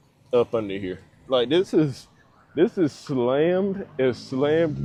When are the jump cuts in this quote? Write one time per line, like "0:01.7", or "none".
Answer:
none